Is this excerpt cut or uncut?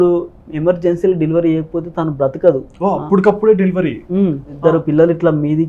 cut